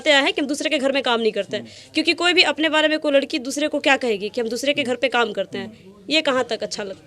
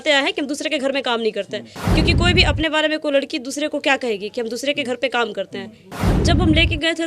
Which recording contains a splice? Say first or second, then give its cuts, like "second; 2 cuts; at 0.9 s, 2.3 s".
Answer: second; 1 cut; at 6.0 s